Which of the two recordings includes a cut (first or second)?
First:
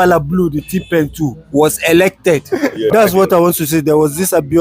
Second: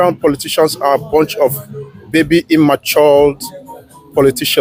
first